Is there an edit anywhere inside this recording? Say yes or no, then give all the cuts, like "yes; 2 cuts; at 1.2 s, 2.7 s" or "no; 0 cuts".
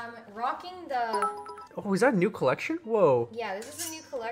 no; 0 cuts